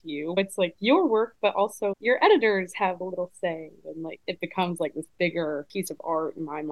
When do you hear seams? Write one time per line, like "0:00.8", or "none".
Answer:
0:04.1
0:05.7